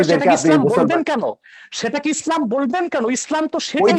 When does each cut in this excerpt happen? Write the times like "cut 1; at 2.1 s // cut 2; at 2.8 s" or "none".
none